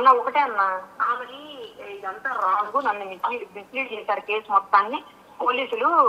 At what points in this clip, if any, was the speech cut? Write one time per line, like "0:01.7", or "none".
none